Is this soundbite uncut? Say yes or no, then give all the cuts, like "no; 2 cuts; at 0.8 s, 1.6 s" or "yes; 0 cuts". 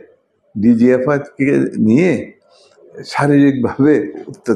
yes; 0 cuts